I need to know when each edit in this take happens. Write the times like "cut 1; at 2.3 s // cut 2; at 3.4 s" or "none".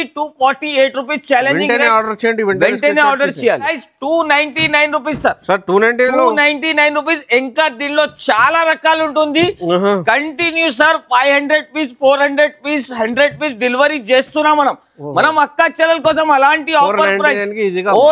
cut 1; at 3.7 s

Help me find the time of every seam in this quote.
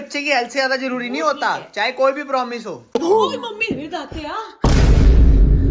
cut 1; at 2.9 s

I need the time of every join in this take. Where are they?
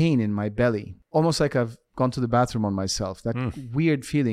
cut 1; at 0.9 s

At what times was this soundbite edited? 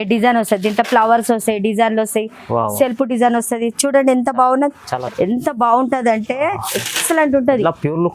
cut 1; at 4.9 s

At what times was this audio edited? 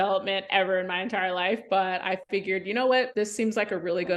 cut 1; at 3.1 s

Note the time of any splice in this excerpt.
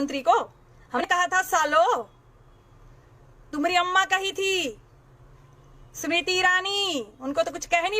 cut 1; at 1.1 s

